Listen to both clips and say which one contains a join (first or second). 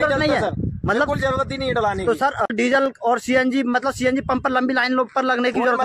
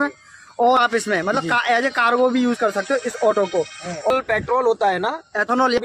second